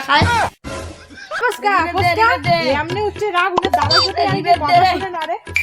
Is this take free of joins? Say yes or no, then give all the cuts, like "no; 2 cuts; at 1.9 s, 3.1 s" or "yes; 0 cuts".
no; 1 cut; at 1.4 s